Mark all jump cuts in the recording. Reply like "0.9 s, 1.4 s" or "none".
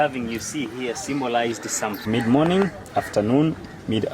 2.0 s